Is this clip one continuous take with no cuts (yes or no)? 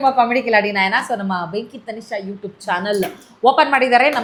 yes